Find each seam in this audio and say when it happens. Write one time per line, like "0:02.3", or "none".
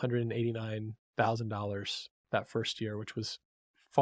none